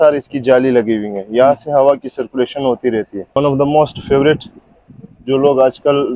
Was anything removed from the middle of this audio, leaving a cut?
yes; 1 cut; at 3.4 s

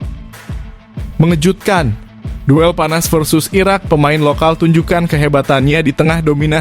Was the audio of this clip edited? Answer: yes; 1 cut; at 1.2 s

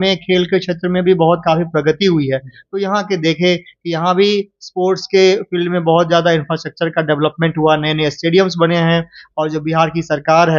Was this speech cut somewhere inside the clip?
no; 0 cuts

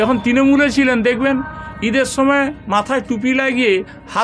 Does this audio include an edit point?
no; 0 cuts

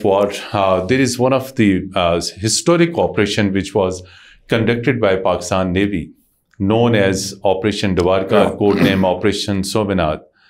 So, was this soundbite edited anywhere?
no; 0 cuts

